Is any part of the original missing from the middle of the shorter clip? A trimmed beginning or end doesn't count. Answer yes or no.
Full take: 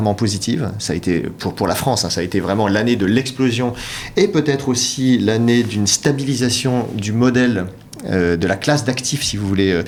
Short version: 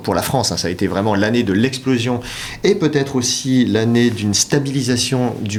no